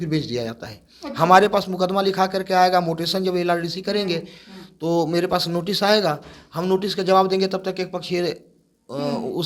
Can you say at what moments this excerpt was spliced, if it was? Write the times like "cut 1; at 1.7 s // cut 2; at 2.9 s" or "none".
none